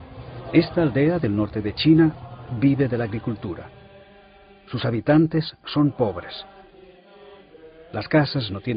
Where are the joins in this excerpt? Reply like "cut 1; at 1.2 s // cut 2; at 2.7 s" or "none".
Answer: cut 1; at 7.7 s